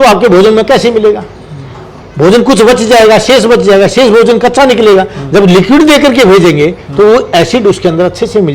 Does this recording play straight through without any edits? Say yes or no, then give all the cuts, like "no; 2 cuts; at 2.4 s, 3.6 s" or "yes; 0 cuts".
yes; 0 cuts